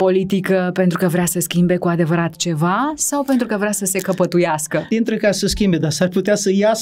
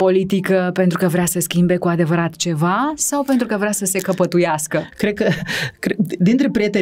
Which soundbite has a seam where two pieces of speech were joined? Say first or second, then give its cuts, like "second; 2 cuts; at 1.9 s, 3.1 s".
first; 1 cut; at 4.9 s